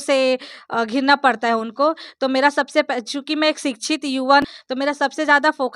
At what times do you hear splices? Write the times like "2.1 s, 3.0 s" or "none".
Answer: 4.4 s